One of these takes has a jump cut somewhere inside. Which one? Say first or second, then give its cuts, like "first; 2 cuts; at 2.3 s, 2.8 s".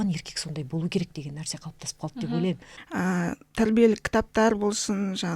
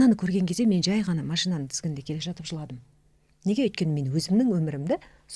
first; 1 cut; at 2.7 s